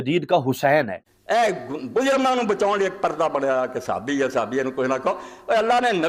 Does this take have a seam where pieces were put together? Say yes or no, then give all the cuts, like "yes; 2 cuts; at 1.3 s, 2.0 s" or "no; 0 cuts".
yes; 1 cut; at 1.0 s